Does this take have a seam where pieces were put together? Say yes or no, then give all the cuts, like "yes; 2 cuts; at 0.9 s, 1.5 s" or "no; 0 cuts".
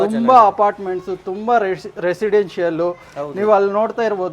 no; 0 cuts